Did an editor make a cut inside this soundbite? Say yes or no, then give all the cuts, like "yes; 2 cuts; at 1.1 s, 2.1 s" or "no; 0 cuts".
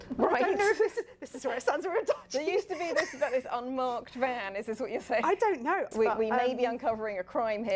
yes; 1 cut; at 5.9 s